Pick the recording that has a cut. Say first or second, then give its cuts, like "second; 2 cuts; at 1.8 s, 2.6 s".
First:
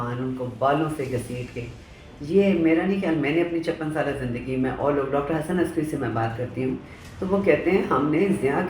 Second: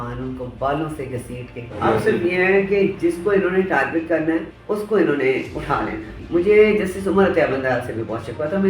second; 3 cuts; at 1.8 s, 4.5 s, 6.2 s